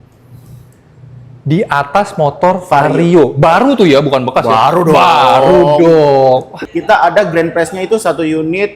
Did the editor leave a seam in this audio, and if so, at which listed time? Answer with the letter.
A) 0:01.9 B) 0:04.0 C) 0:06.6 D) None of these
C